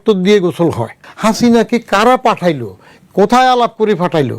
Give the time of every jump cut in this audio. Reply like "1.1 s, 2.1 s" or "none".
1.0 s